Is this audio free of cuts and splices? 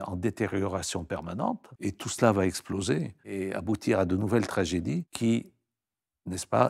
no; 3 cuts; at 1.7 s, 3.2 s, 5.1 s

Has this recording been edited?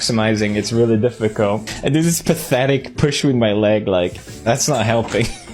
yes; 1 cut; at 1.7 s

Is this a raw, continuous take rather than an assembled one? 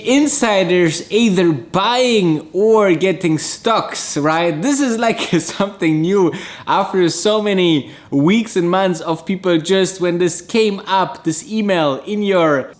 yes; 0 cuts

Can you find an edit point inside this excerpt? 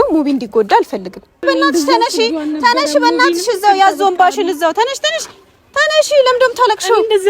yes; 1 cut; at 1.4 s

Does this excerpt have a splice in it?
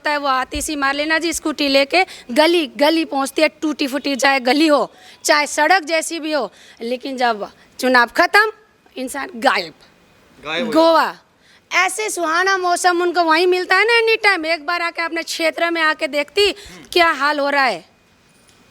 no; 0 cuts

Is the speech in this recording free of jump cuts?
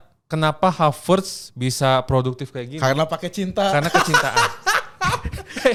yes; 0 cuts

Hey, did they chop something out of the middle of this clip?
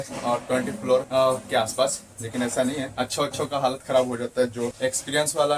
yes; 3 cuts; at 1.1 s, 2.9 s, 4.7 s

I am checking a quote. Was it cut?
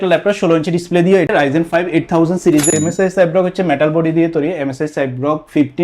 yes; 2 cuts; at 1.3 s, 2.7 s

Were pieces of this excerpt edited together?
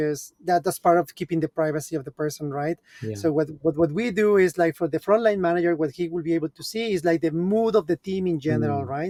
no; 0 cuts

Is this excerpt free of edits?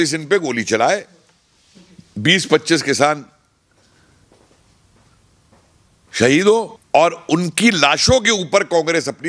no; 1 cut; at 6.8 s

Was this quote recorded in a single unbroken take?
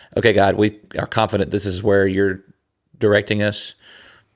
no; 1 cut; at 0.9 s

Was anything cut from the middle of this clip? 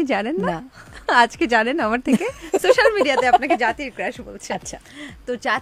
no; 0 cuts

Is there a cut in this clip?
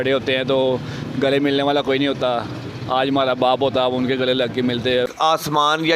yes; 1 cut; at 5.0 s

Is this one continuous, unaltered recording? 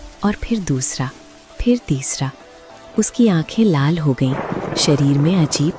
yes; 0 cuts

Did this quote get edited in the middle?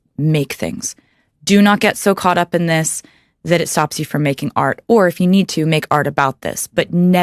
no; 0 cuts

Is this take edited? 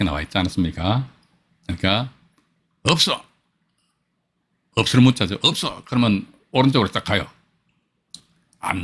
no; 0 cuts

